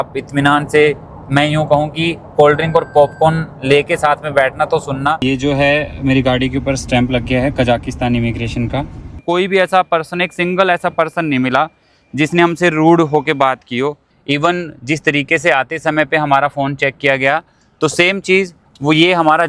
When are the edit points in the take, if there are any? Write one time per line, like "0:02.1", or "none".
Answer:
0:05.2
0:09.2
0:14.1